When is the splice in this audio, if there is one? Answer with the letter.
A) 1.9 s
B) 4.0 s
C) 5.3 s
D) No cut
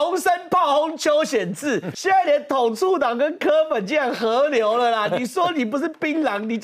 A